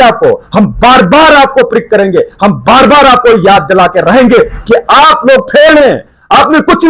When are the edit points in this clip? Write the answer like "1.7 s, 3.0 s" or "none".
none